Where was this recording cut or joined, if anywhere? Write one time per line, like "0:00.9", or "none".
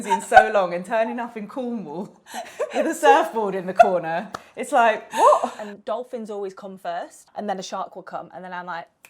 0:05.6
0:07.2